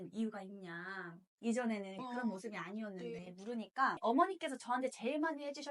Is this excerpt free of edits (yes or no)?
no